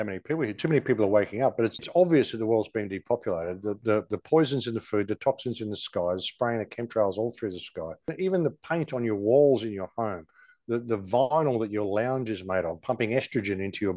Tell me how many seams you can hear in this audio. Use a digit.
2